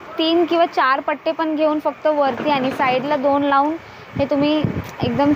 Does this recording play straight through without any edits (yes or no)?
yes